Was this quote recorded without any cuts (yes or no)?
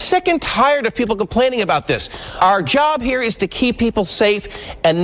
yes